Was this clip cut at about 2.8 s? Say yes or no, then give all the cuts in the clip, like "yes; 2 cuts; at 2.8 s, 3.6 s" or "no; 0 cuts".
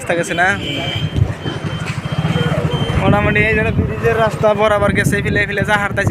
no; 0 cuts